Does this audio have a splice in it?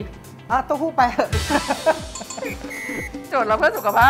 no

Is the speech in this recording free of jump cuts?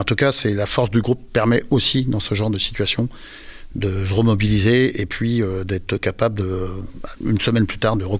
yes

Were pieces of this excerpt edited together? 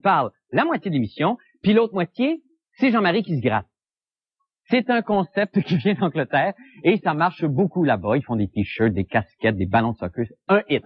yes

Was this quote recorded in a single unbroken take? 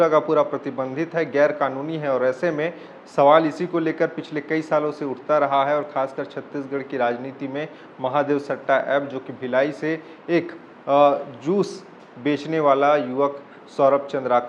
yes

